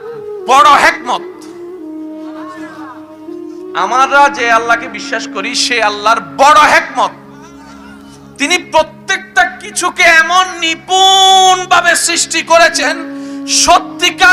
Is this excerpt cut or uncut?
uncut